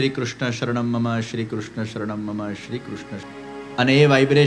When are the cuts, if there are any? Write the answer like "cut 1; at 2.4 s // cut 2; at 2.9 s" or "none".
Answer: cut 1; at 3.3 s